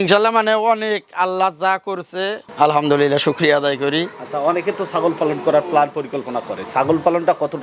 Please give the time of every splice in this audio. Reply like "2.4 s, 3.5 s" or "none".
none